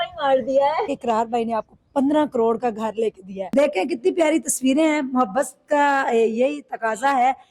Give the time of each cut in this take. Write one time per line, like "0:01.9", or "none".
0:00.9
0:03.4